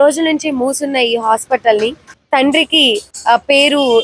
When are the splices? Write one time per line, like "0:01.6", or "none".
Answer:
0:02.1
0:03.1